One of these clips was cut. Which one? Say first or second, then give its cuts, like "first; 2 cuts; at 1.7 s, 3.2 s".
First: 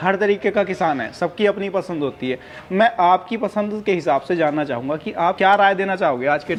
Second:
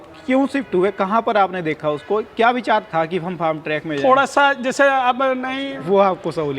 second; 1 cut; at 5.4 s